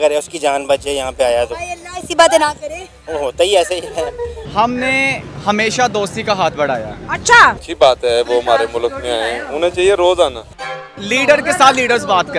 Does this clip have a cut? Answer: yes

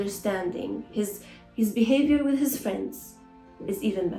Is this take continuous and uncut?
yes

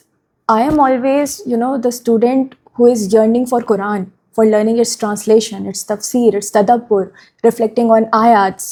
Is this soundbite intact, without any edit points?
yes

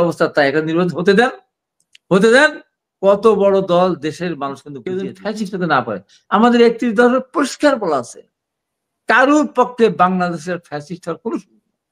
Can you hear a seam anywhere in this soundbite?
yes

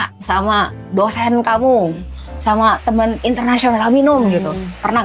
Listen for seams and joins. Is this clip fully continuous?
yes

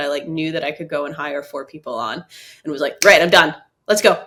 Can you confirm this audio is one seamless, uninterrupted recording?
yes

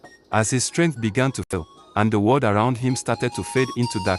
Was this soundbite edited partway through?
yes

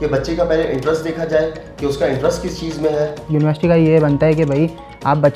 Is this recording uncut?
no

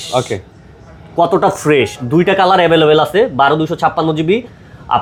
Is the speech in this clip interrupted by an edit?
no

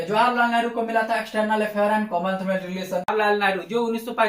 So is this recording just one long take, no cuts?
no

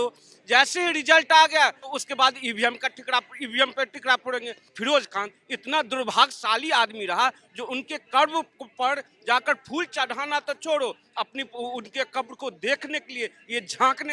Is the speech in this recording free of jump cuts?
no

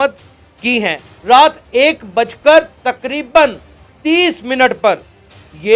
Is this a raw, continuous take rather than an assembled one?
no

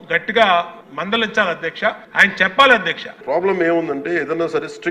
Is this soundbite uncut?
no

